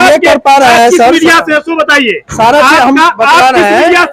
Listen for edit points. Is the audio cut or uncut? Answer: uncut